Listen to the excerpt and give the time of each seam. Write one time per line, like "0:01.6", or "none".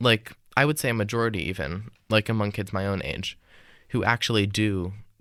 none